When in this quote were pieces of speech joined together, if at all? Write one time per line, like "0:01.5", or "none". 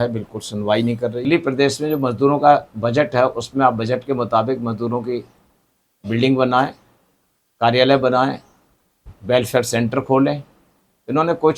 0:01.2